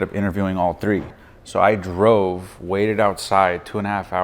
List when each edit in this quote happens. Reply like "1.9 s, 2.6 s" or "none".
1.2 s